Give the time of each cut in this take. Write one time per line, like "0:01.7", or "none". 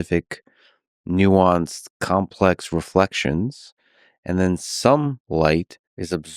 none